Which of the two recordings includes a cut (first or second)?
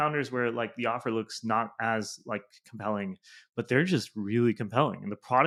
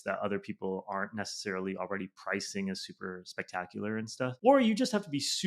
second